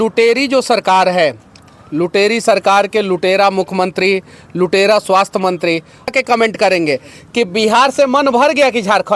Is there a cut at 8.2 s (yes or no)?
no